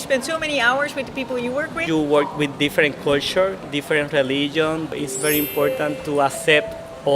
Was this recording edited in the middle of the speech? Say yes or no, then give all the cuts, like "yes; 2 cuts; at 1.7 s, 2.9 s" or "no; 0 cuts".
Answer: yes; 1 cut; at 1.8 s